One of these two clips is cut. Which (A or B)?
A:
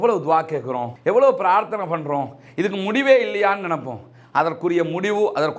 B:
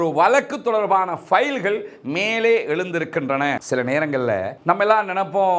B